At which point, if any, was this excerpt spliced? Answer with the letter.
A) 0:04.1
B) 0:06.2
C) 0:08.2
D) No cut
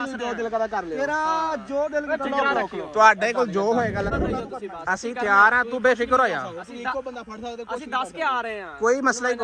A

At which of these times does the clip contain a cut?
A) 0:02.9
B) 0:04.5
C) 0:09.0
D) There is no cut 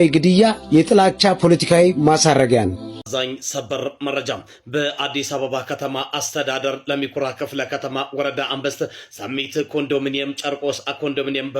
A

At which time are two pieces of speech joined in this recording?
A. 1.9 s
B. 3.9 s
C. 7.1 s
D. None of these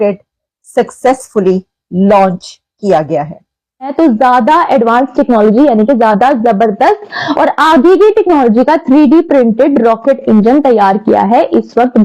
B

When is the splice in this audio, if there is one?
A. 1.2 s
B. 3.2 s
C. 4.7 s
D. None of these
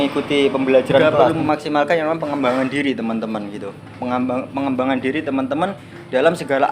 A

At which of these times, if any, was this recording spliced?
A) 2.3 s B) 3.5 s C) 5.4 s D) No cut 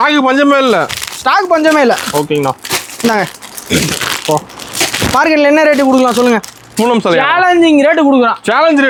D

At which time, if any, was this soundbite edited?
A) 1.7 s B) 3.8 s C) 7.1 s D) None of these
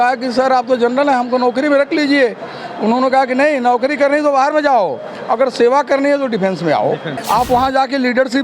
C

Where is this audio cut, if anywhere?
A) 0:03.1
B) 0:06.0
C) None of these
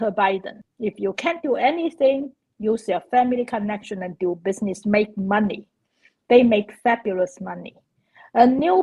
C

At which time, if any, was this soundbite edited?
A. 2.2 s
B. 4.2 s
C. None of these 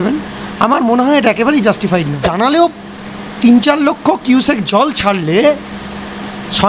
A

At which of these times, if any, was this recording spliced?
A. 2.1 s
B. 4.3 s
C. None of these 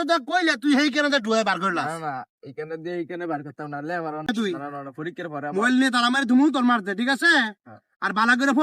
B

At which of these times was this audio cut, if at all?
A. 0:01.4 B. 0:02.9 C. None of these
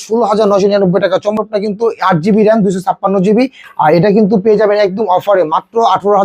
A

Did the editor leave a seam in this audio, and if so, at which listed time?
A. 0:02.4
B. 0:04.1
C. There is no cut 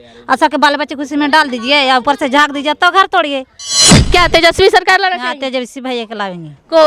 B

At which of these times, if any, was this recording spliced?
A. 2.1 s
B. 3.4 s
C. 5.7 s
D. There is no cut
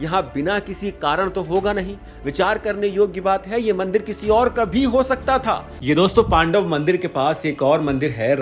C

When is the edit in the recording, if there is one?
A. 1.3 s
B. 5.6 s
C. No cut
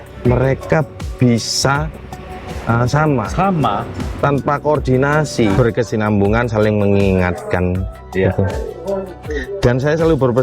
B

